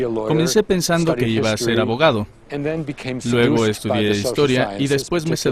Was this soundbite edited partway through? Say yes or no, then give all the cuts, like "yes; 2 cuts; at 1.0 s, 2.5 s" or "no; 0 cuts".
no; 0 cuts